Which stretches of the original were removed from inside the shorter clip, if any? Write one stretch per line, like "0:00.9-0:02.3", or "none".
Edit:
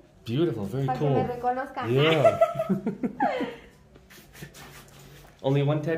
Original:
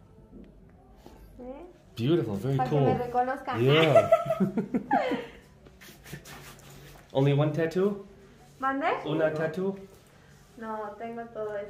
none